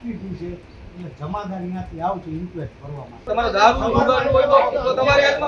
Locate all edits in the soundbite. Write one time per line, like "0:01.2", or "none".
0:03.2